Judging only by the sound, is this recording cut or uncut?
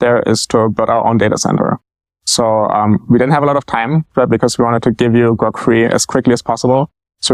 uncut